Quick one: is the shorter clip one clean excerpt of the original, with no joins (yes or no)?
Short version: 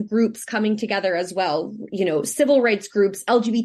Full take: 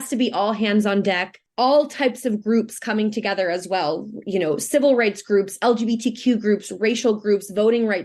yes